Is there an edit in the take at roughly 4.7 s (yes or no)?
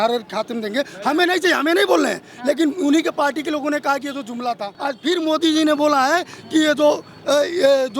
yes